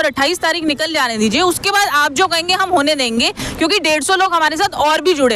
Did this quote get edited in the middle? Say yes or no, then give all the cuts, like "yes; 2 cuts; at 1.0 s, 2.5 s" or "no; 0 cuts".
no; 0 cuts